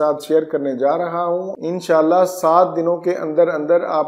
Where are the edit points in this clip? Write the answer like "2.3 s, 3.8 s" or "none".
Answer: 1.5 s

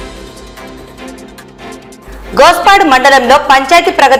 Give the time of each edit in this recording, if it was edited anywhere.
none

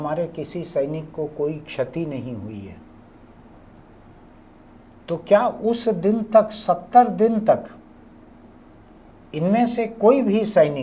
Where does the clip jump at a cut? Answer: none

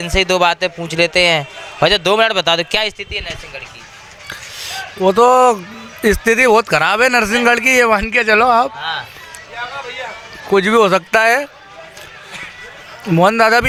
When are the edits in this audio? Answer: none

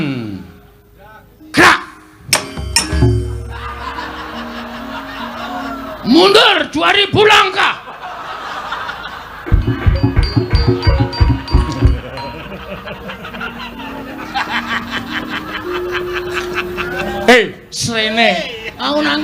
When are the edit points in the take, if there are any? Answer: none

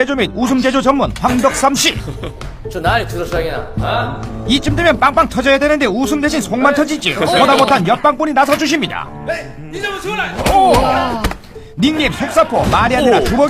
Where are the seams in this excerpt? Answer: 8.0 s

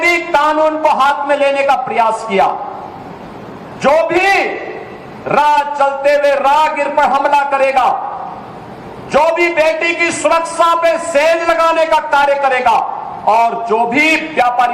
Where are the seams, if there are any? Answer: 7.2 s

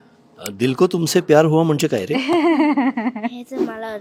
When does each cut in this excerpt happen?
none

